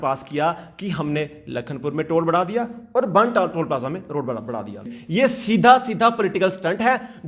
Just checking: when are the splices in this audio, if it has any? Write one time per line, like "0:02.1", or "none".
0:05.0